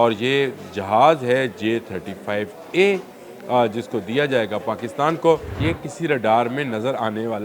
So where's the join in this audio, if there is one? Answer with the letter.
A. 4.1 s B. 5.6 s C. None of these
B